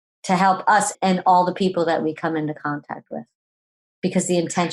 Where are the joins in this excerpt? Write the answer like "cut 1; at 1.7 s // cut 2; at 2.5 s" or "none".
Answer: cut 1; at 0.9 s